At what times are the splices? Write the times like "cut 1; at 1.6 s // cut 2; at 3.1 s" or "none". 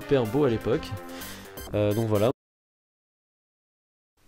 none